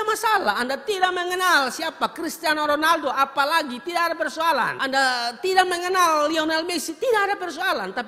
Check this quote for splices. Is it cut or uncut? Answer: cut